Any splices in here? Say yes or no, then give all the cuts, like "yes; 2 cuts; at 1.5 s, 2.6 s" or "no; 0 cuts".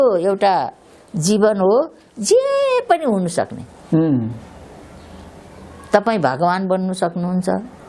no; 0 cuts